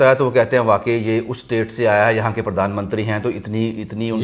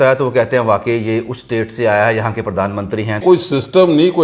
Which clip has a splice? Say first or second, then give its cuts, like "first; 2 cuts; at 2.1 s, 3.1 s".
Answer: second; 1 cut; at 3.2 s